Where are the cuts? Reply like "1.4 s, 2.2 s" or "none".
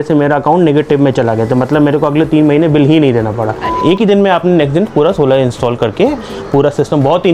3.8 s

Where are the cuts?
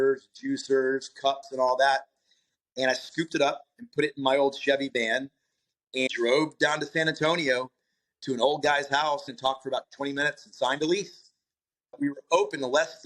6.1 s, 9.3 s, 11.8 s

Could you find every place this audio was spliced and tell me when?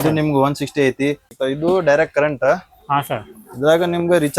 1.3 s

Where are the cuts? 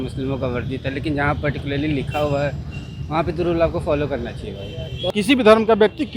5.1 s

